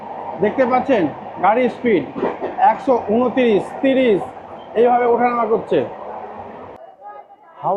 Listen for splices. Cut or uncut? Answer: cut